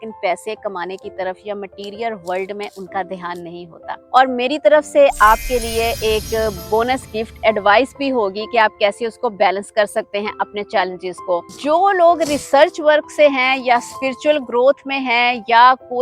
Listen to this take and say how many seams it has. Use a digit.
2